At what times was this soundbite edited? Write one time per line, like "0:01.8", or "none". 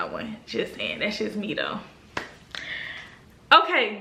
none